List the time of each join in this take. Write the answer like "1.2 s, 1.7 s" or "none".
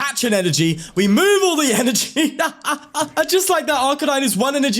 3.1 s